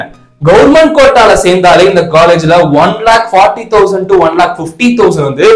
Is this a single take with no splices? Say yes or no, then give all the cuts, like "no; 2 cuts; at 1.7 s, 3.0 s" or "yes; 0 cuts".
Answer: yes; 0 cuts